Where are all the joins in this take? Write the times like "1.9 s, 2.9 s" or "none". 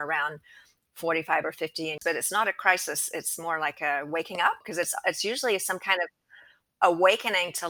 2.0 s, 4.7 s